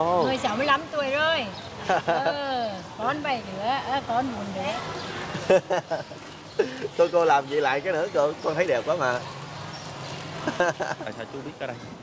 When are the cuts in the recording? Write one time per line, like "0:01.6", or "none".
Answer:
0:04.7
0:11.0